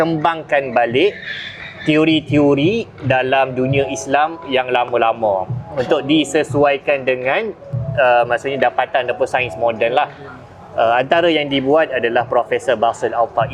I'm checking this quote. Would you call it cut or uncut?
uncut